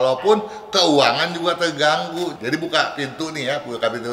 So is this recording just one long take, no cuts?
no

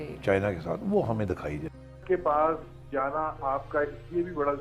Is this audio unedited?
no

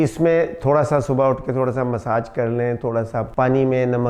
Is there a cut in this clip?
no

